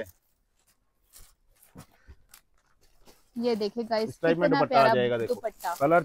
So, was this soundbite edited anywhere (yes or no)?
no